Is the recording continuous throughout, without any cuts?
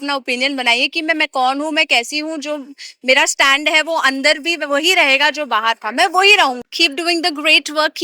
no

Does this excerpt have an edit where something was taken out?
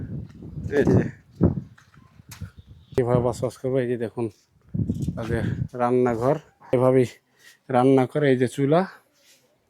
yes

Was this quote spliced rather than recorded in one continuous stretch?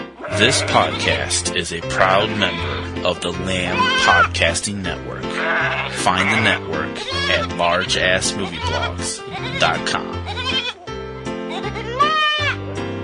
no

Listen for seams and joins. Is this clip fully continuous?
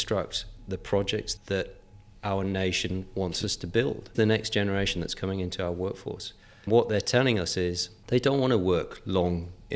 no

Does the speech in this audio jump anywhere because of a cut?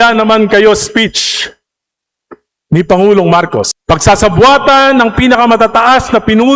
yes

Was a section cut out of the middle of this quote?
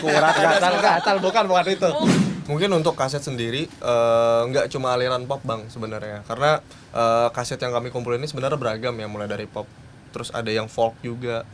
yes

